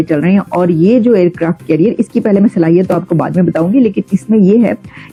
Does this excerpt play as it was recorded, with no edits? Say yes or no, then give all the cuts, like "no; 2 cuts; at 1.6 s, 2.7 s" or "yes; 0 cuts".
yes; 0 cuts